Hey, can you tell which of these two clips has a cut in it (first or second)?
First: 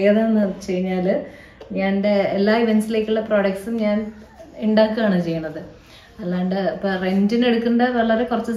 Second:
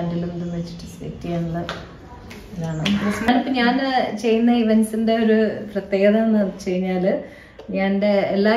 second